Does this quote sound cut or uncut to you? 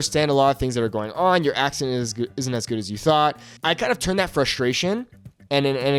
uncut